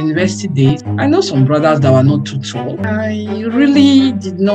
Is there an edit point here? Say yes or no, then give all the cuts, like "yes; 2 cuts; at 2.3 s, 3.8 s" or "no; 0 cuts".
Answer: yes; 2 cuts; at 0.7 s, 2.8 s